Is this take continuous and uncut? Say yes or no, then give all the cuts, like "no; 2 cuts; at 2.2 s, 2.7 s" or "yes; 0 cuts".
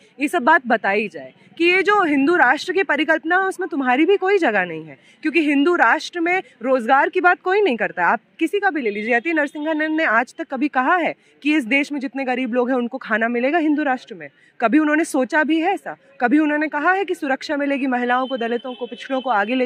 yes; 0 cuts